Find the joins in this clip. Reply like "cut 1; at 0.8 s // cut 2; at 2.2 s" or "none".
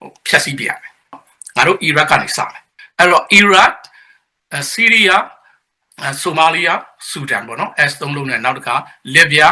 cut 1; at 1.2 s // cut 2; at 2.8 s